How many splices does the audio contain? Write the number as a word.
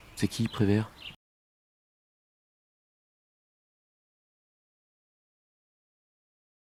zero